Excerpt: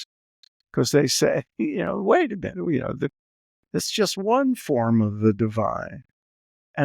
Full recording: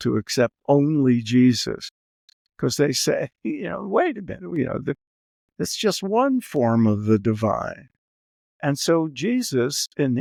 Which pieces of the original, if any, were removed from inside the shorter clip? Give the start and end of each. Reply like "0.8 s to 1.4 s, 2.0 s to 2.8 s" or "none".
none